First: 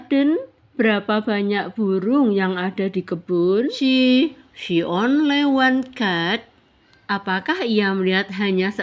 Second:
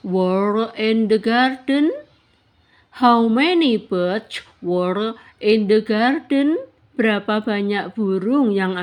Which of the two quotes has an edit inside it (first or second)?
first